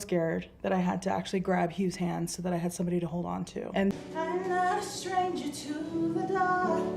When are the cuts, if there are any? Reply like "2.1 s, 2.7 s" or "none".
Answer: 3.9 s